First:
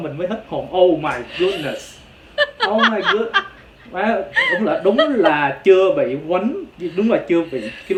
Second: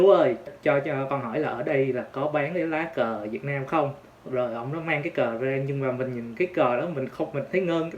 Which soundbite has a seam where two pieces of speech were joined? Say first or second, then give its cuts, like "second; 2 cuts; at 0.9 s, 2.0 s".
second; 1 cut; at 4.1 s